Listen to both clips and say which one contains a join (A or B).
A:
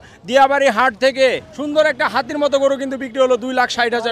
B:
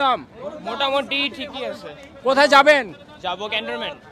A